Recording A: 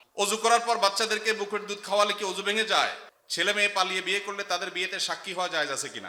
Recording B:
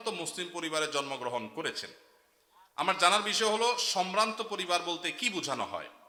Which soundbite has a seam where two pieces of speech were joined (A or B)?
A